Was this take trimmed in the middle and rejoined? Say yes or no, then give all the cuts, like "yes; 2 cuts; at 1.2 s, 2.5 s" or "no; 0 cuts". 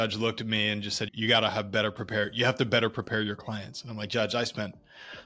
yes; 1 cut; at 1.0 s